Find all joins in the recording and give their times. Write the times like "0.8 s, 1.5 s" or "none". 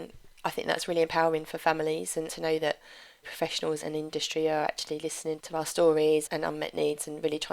2.3 s, 3.8 s, 6.3 s